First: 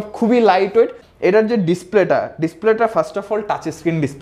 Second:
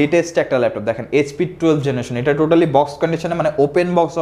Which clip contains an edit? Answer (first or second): first